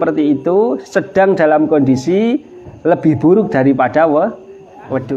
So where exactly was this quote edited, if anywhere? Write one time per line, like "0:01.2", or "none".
none